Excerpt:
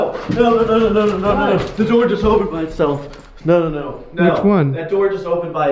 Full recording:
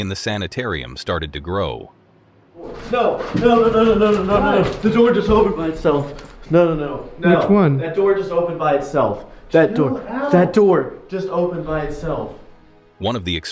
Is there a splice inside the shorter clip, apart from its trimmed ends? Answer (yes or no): no